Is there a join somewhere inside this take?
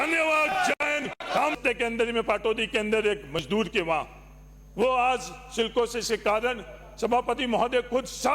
yes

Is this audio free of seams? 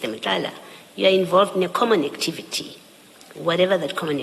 yes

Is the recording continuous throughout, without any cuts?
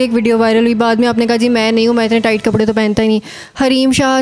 yes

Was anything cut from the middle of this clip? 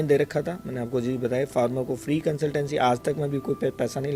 no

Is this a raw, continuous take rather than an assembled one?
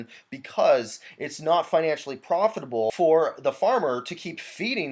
no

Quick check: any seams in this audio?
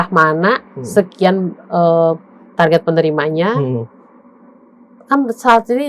no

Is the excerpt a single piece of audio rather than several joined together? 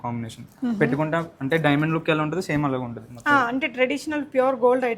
yes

